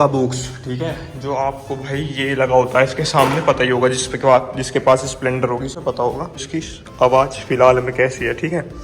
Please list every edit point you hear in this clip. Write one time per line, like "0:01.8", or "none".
0:06.5